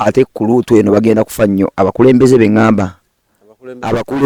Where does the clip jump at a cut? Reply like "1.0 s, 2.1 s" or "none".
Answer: none